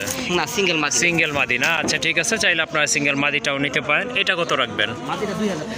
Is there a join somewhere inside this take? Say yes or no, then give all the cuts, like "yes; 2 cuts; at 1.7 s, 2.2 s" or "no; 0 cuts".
no; 0 cuts